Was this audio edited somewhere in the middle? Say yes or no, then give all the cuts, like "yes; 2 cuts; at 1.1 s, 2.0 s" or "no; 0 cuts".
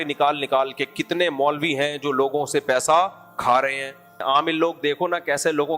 yes; 1 cut; at 4.1 s